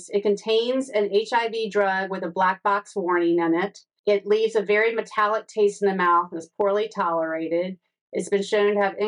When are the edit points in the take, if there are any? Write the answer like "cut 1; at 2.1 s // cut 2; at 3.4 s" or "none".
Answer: cut 1; at 4.0 s